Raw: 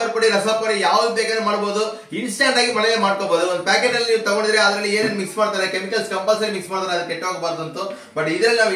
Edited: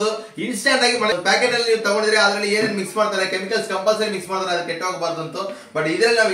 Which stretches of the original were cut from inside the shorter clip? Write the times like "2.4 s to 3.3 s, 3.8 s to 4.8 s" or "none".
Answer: 2.9 s to 3.5 s